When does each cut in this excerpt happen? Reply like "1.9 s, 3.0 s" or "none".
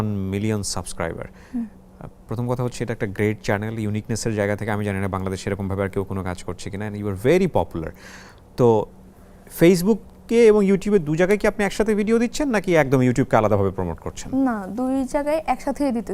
none